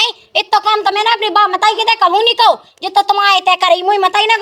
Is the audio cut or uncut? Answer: uncut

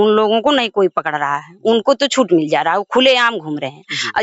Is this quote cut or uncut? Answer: uncut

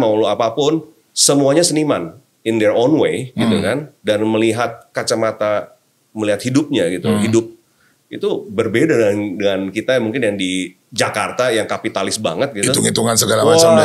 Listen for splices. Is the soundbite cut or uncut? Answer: uncut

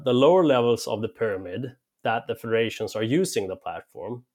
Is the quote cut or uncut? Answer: uncut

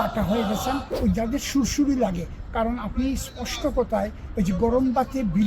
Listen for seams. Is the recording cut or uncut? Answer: cut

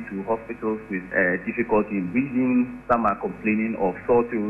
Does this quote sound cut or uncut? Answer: cut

